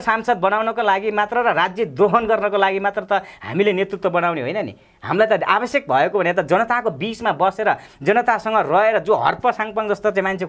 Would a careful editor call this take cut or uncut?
uncut